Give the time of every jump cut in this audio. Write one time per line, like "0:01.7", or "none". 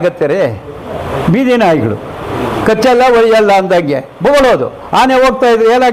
none